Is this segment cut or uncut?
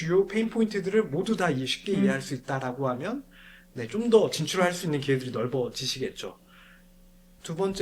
uncut